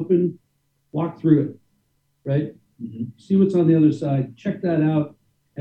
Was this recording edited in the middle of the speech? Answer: no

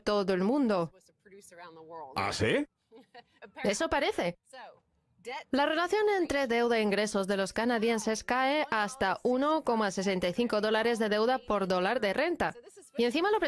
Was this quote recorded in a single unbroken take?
no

